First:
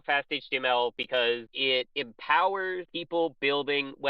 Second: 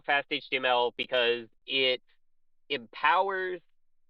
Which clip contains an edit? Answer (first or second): first